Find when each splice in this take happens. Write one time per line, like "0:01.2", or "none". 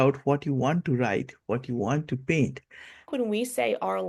0:03.0